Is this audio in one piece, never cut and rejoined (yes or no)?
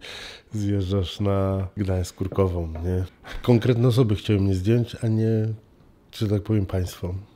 no